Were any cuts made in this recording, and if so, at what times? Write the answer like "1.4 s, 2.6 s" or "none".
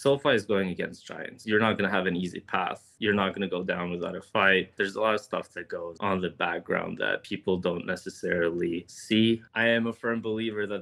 none